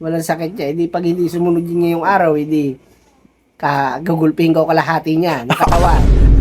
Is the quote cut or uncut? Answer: uncut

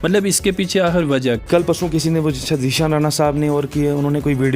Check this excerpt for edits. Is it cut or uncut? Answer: cut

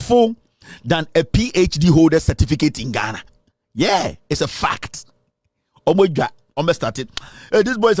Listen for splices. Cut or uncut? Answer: uncut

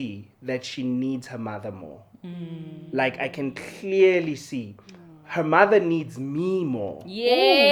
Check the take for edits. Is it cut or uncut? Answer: uncut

